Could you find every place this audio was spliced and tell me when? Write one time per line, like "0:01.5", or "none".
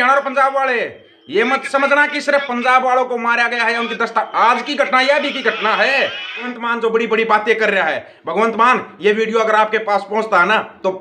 0:06.5